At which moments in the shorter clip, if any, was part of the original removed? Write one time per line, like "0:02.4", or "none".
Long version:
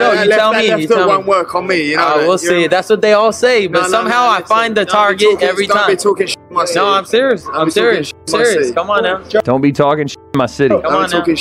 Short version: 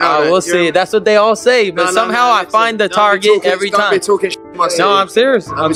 none